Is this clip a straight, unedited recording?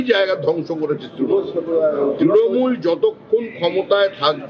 yes; 0 cuts

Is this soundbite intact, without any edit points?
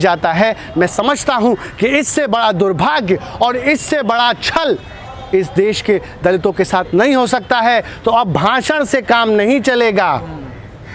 yes; 0 cuts

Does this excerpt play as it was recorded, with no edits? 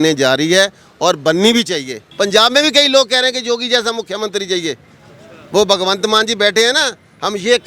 no; 1 cut; at 2.0 s

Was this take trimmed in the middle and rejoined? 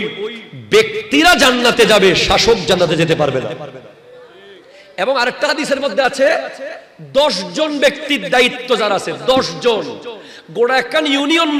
no; 0 cuts

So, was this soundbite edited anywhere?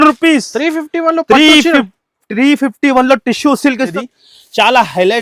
yes; 1 cut; at 3.9 s

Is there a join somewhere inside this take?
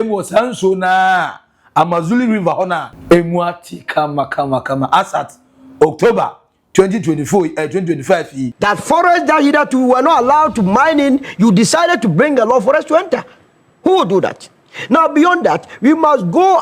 yes; 2 cuts; at 2.9 s, 8.5 s

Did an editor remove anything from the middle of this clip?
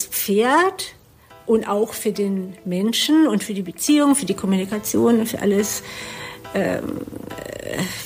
no; 0 cuts

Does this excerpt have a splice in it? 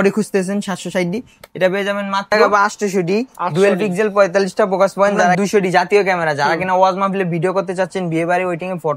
yes; 2 cuts; at 2.4 s, 5.4 s

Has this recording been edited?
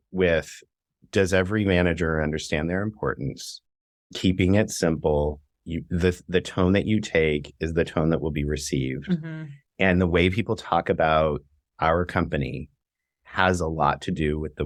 no; 0 cuts

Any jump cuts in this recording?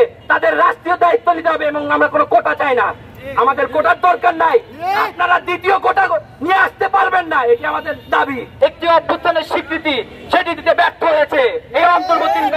yes; 1 cut; at 8.5 s

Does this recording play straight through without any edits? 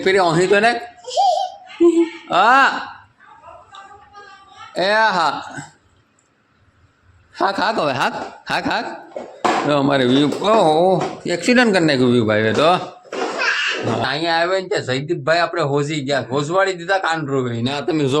no; 1 cut; at 14.0 s

